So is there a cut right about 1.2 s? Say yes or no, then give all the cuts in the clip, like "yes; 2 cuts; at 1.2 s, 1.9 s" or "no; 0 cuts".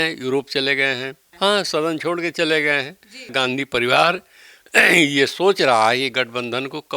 yes; 2 cuts; at 1.2 s, 3.3 s